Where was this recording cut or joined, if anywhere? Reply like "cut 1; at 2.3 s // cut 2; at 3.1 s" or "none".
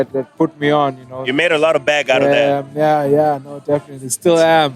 none